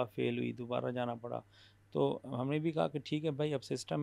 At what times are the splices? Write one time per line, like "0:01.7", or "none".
none